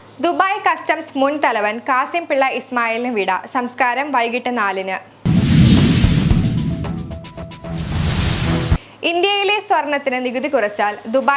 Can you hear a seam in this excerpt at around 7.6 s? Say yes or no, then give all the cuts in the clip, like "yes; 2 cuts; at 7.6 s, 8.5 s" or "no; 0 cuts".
yes; 2 cuts; at 5.2 s, 7.6 s